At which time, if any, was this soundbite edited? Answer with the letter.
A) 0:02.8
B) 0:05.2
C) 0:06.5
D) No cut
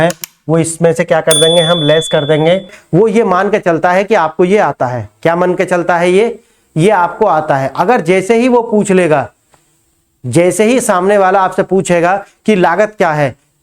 A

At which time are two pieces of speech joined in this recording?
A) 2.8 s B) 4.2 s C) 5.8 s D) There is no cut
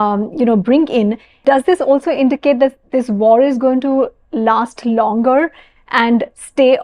D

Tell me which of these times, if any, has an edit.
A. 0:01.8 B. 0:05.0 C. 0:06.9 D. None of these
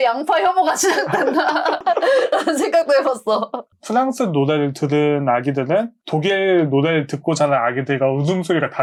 D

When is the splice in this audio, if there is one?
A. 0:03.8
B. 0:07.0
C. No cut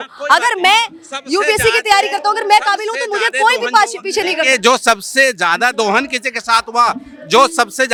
C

